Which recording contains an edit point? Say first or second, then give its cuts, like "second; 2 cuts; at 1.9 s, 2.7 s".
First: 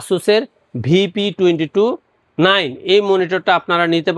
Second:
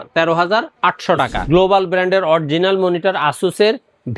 second; 1 cut; at 1.4 s